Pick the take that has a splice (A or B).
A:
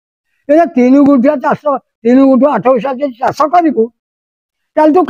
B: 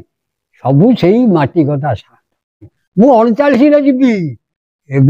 B